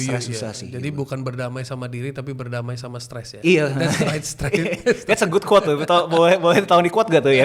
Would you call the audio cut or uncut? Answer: uncut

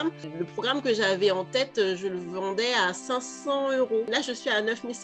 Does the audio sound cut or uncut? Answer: cut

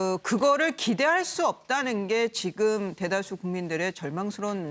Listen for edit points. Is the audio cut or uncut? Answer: cut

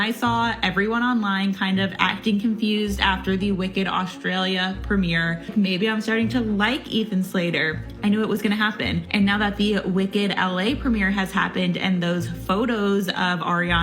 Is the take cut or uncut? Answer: cut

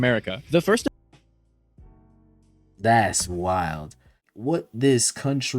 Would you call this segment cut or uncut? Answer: cut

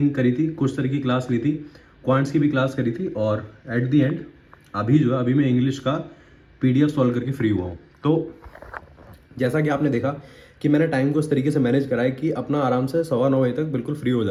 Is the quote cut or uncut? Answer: uncut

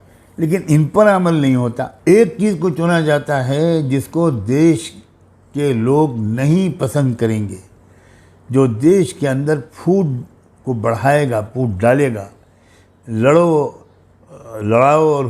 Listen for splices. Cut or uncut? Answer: cut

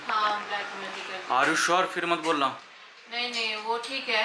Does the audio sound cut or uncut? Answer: uncut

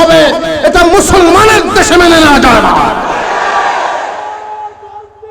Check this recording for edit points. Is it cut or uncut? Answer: uncut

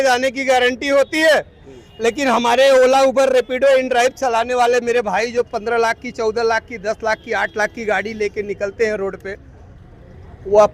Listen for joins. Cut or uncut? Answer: uncut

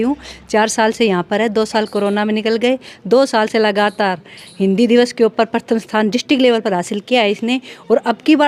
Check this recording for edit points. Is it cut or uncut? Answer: uncut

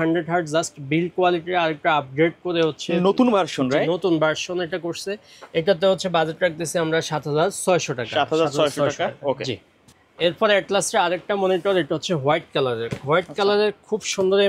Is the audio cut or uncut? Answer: uncut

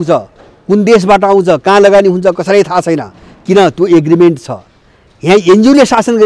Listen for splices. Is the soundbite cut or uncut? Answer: uncut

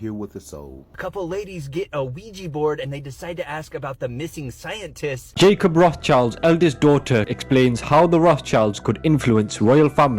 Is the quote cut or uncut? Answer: cut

